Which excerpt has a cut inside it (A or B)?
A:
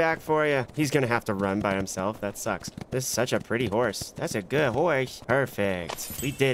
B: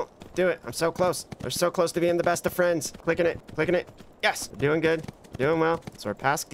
A